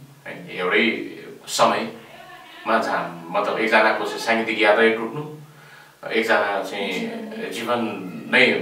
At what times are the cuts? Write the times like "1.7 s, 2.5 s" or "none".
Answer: none